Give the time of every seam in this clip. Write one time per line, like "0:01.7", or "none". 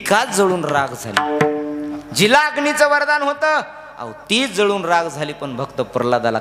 none